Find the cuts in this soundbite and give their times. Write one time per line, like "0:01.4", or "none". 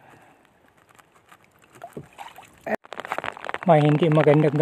0:02.7